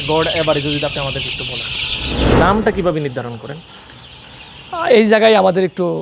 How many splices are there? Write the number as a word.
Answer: one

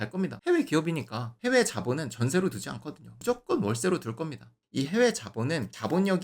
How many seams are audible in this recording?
two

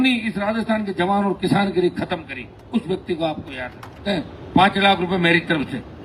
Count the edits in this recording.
one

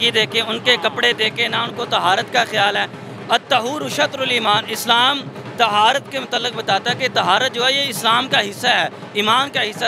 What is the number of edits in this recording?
zero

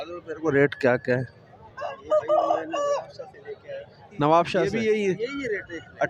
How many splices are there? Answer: one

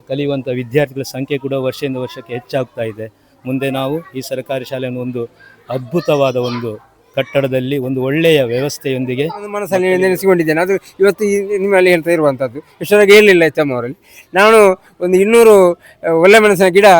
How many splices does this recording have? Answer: one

